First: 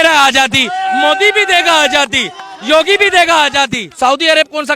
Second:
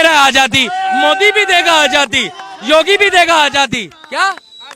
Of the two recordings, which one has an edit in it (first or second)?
first